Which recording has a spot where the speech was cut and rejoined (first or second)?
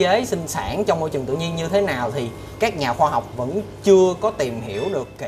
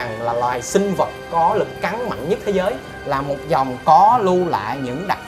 second